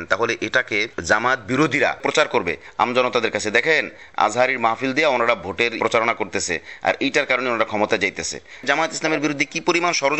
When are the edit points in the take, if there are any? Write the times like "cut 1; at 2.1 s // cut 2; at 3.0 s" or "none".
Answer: cut 1; at 2.0 s // cut 2; at 5.8 s // cut 3; at 8.6 s